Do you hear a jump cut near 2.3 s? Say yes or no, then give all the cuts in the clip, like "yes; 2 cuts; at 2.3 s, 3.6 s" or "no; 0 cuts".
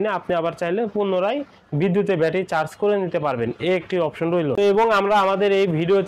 no; 1 cut; at 4.5 s